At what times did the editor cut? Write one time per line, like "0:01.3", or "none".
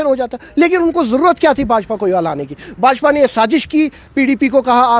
none